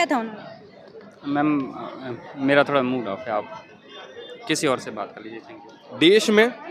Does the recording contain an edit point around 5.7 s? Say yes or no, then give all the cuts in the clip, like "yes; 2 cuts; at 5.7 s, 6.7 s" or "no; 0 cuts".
yes; 1 cut; at 5.7 s